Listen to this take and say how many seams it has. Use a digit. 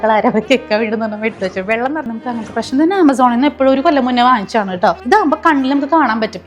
2